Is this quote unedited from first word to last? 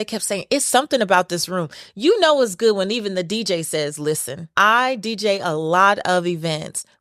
no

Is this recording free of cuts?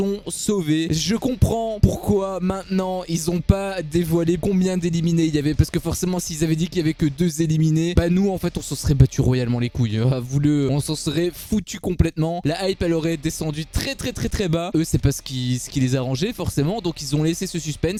yes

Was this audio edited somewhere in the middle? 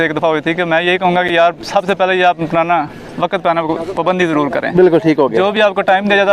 no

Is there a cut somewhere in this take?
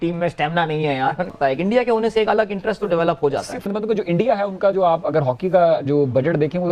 yes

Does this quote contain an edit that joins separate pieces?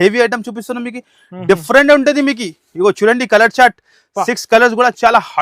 no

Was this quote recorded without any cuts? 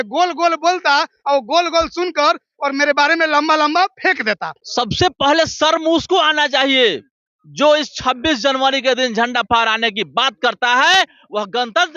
no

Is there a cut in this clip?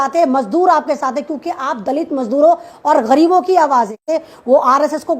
yes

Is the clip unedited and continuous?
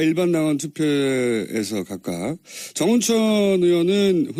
yes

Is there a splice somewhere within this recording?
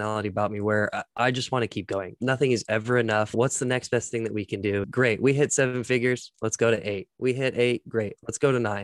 no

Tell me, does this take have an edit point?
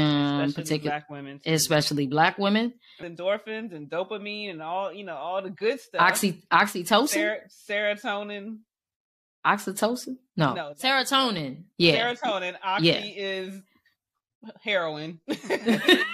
yes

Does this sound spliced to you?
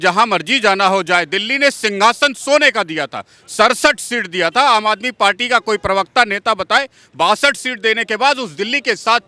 no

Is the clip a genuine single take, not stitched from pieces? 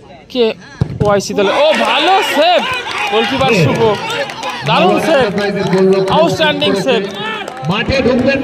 yes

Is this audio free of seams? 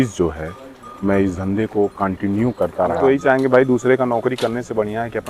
no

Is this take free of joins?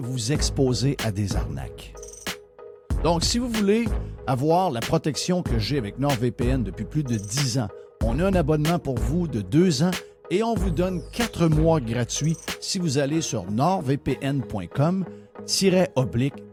yes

